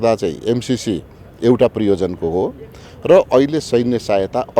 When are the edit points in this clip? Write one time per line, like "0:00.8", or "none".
none